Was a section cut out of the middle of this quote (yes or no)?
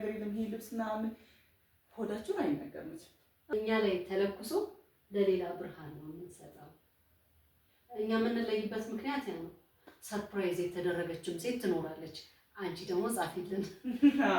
yes